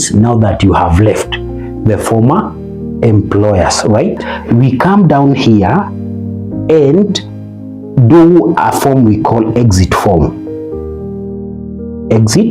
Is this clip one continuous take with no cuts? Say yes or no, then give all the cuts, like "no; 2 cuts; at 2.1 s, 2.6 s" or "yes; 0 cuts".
no; 1 cut; at 4.3 s